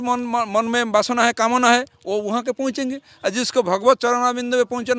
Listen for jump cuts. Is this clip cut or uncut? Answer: uncut